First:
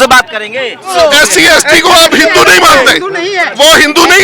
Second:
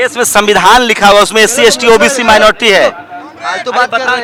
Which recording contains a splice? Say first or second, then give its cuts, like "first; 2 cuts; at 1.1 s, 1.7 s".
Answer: first; 1 cut; at 0.9 s